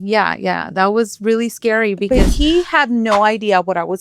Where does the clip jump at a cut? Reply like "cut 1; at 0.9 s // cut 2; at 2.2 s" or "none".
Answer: cut 1; at 2.0 s